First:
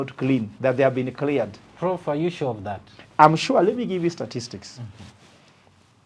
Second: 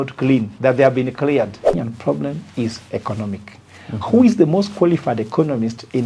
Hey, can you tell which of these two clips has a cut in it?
second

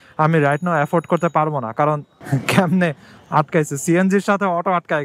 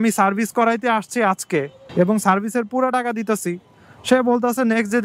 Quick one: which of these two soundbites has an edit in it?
first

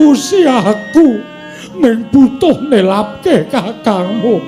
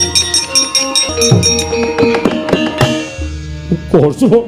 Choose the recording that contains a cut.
second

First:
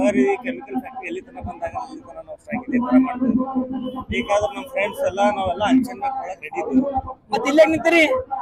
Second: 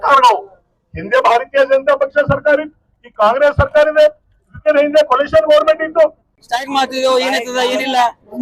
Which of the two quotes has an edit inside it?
second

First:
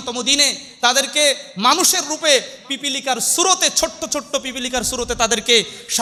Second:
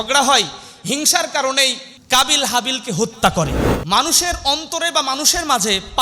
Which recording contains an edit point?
second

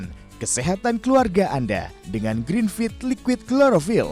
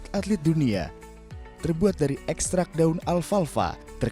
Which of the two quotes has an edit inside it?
second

